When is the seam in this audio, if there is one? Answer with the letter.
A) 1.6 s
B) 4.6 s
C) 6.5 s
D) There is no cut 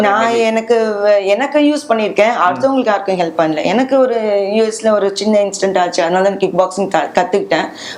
D